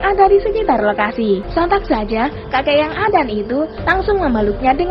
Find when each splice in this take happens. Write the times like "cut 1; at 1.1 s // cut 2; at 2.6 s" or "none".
cut 1; at 1.5 s

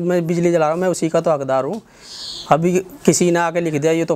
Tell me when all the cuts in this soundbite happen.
none

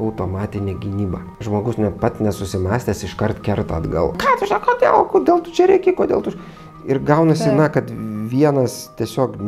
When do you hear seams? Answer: cut 1; at 4.2 s

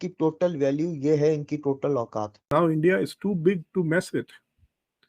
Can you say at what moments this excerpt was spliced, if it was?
cut 1; at 2.4 s

